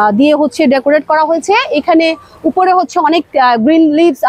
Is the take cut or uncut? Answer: uncut